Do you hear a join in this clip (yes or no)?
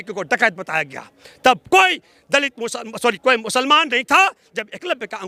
no